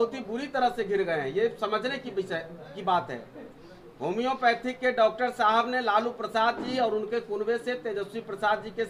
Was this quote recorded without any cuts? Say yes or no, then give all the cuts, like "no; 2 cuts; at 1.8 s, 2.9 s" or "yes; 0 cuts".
yes; 0 cuts